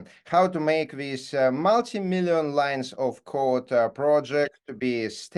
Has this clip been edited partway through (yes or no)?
no